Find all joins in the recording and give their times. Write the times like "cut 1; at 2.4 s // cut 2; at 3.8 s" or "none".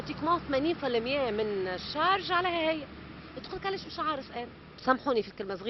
cut 1; at 4.6 s